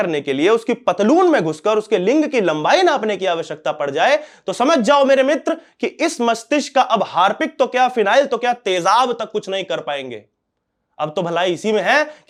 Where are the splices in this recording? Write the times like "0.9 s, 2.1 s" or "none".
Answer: none